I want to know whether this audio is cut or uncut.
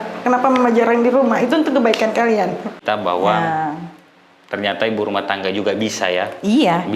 cut